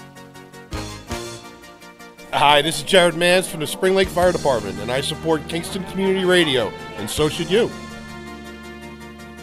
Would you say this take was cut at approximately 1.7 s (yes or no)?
no